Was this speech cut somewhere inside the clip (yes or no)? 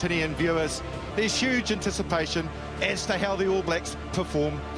yes